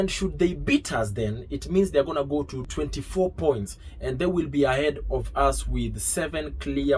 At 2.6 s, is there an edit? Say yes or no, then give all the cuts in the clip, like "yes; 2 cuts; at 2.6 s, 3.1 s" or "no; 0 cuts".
yes; 1 cut; at 2.6 s